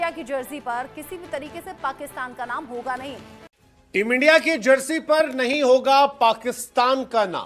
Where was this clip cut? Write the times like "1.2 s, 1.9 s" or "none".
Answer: 3.5 s

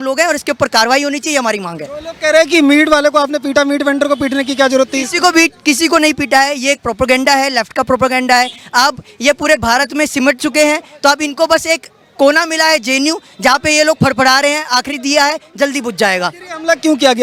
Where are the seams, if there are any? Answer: none

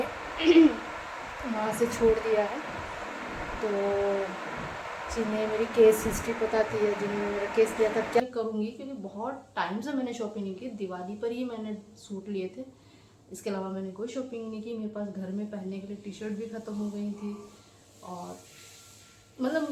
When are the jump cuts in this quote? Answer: 8.2 s

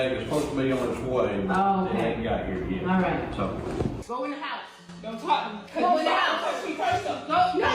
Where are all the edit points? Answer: 4.0 s

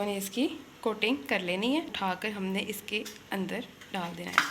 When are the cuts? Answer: 1.9 s

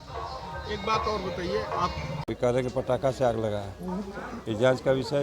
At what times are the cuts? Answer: 2.1 s

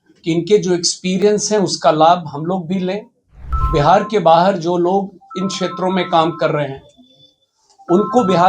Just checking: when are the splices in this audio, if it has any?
3.6 s

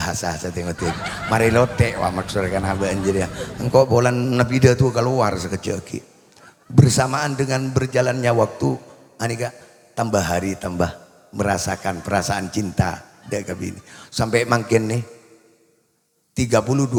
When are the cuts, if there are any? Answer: none

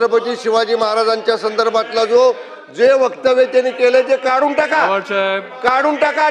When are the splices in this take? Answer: none

